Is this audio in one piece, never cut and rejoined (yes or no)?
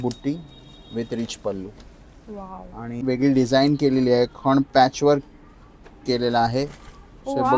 no